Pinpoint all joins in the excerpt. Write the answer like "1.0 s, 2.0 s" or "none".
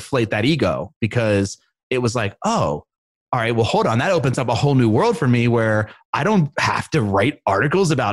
none